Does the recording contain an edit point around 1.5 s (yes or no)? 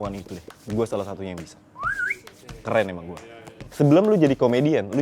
no